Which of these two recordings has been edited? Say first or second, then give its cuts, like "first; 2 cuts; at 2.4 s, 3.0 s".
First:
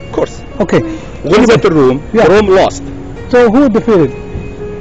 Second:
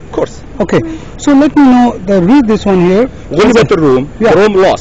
first; 1 cut; at 1.1 s